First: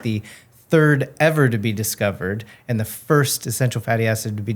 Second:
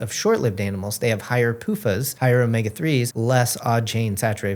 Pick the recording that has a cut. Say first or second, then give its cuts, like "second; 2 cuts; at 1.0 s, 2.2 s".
second; 2 cuts; at 2.1 s, 3.1 s